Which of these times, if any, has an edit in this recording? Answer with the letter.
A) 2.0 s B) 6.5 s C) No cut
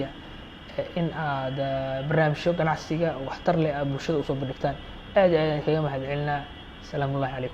C